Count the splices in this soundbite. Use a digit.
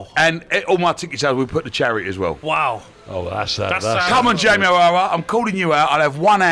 1